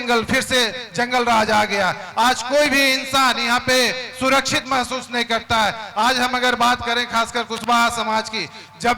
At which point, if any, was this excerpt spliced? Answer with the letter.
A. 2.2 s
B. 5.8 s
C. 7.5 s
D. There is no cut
D